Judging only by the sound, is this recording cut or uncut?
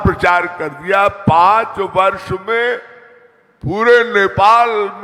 uncut